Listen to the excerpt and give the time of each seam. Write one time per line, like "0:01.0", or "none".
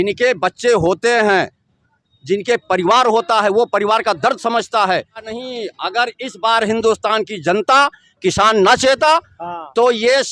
0:05.3